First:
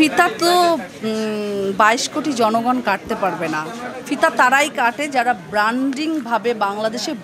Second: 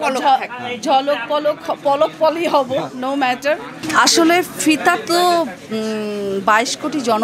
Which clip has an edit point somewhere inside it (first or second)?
second